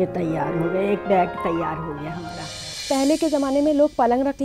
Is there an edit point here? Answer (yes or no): yes